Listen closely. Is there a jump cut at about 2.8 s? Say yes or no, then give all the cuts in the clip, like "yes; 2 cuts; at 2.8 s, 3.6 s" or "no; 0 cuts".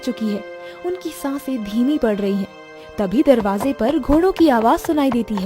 no; 0 cuts